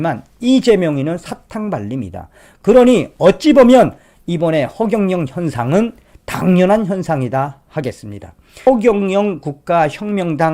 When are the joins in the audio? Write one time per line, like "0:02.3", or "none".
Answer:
0:08.7